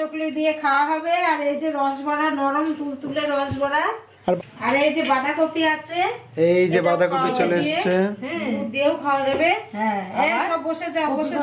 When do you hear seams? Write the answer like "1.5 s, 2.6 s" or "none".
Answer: 4.4 s